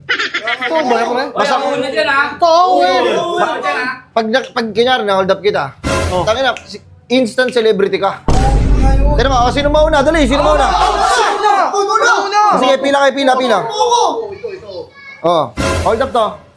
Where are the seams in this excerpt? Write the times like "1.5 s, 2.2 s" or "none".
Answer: none